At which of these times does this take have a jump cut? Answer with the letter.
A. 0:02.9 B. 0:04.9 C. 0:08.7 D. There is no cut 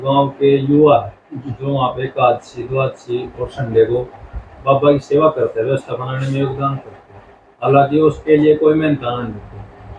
D